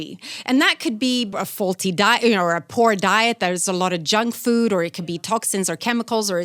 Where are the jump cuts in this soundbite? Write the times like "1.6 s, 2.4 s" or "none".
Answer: 1.3 s

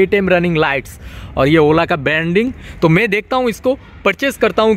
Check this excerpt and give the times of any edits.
none

